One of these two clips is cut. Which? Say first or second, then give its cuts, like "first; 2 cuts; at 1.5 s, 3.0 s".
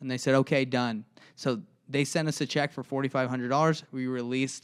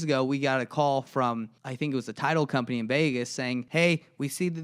second; 2 cuts; at 1.6 s, 3.7 s